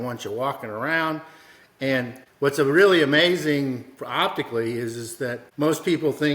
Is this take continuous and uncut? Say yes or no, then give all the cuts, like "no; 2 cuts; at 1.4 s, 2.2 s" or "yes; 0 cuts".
no; 2 cuts; at 2.2 s, 5.4 s